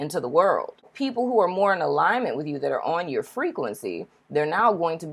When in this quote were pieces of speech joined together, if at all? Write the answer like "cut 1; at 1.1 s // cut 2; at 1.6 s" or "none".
cut 1; at 0.9 s